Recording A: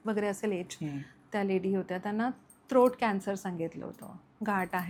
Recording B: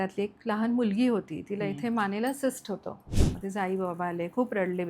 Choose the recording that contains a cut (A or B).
B